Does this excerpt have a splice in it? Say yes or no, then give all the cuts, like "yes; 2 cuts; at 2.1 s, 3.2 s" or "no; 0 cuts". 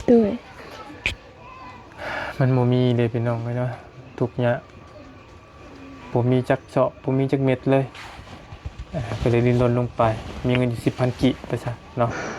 no; 0 cuts